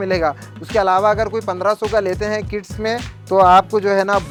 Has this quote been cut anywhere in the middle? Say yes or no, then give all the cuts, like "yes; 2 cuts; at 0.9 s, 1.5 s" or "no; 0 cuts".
no; 0 cuts